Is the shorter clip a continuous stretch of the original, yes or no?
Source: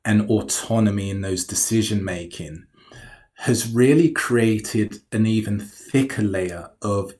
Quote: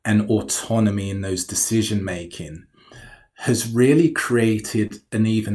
yes